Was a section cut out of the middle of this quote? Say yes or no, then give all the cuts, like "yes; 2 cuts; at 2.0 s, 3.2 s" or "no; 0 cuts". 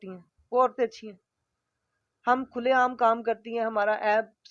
no; 0 cuts